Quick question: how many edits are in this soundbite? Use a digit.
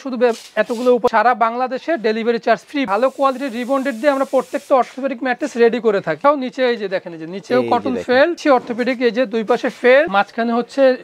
5